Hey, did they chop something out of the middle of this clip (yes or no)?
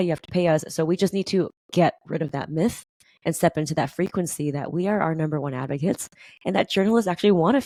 no